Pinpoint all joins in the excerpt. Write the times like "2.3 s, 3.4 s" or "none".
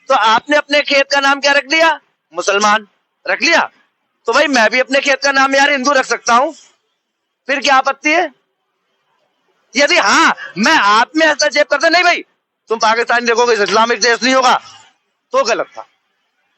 none